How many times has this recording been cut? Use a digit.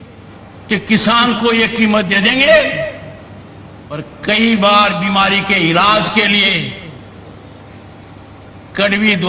1